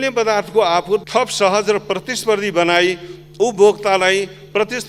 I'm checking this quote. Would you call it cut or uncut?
cut